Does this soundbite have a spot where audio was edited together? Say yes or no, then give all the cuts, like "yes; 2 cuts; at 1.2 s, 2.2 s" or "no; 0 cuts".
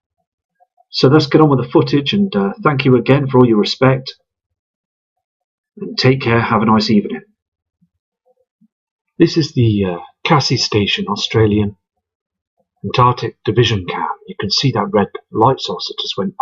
no; 0 cuts